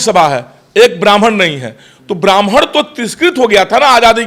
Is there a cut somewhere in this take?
no; 0 cuts

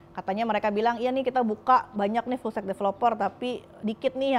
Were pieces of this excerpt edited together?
no; 0 cuts

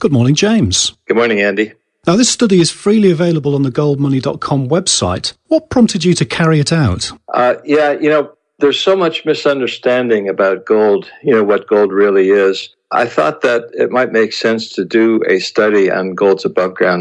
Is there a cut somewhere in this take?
yes; 1 cut; at 7.5 s

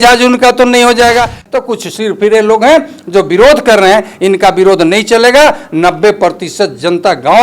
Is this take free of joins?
no; 1 cut; at 1.5 s

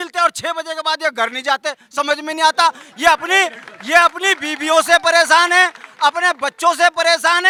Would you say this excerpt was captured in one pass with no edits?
yes; 0 cuts

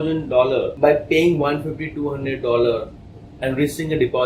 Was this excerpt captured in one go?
yes; 0 cuts

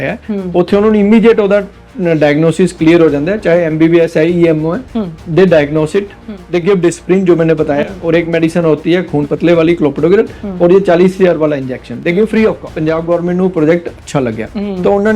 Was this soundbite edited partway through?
yes; 1 cut; at 12.7 s

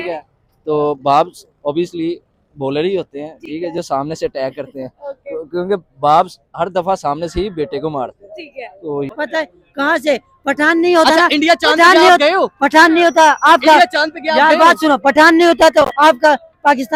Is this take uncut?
yes; 0 cuts

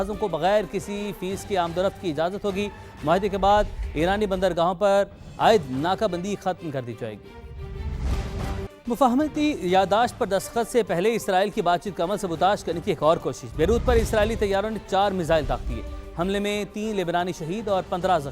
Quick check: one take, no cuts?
no; 1 cut; at 8.8 s

